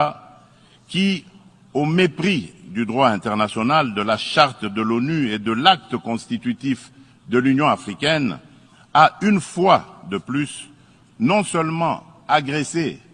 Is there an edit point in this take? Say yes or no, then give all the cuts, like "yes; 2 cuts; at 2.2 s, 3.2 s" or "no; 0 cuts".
no; 0 cuts